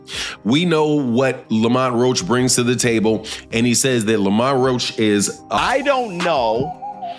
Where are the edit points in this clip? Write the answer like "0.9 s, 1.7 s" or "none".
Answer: 5.6 s